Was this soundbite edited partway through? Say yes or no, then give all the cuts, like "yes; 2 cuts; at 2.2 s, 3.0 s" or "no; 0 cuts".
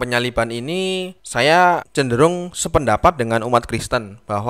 yes; 2 cuts; at 1.2 s, 1.9 s